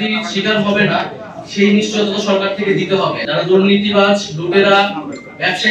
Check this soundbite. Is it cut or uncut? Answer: cut